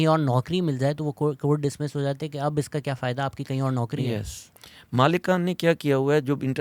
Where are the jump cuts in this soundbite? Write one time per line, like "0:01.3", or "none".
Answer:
0:04.4